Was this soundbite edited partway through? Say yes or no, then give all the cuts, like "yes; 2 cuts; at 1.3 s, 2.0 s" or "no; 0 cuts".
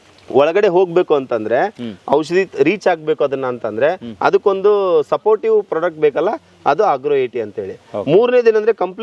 no; 0 cuts